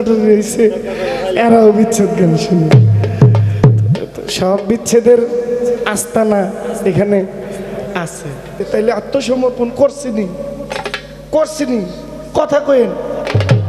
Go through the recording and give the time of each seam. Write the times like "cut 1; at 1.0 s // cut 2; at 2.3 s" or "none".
cut 1; at 8.7 s